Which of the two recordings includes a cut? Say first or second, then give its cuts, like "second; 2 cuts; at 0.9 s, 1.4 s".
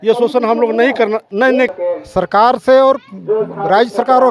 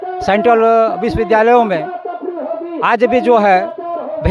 first; 1 cut; at 1.7 s